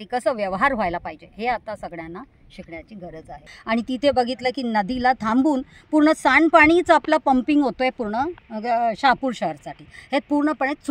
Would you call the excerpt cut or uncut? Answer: cut